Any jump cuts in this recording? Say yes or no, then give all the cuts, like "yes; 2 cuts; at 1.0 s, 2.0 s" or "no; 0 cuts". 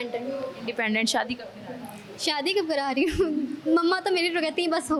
no; 0 cuts